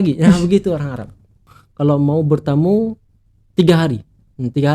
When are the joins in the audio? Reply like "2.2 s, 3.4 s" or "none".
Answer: 1.5 s

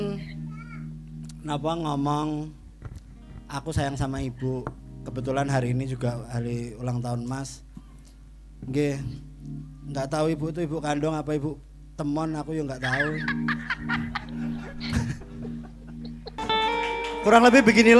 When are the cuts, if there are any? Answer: 16.4 s

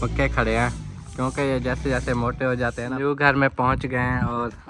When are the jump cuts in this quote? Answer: 2.8 s

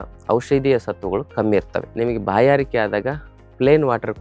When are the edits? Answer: 1.9 s

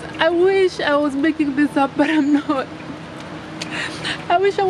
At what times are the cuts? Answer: none

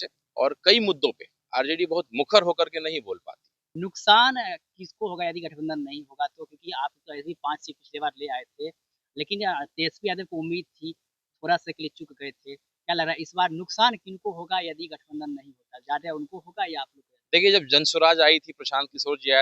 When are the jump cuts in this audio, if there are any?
3.6 s

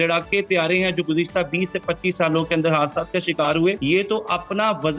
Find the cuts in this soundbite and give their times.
3.8 s

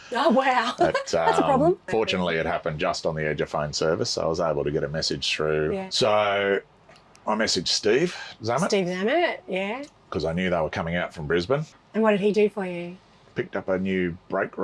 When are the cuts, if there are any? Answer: 1.8 s, 11.7 s

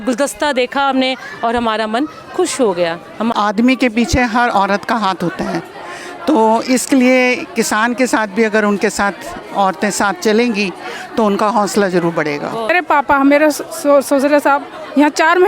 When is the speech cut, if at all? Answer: 3.3 s, 12.7 s

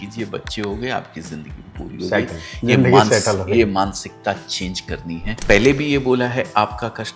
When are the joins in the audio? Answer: 5.4 s

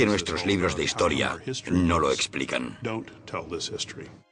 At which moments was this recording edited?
1.7 s

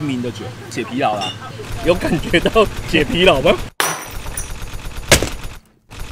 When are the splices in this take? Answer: none

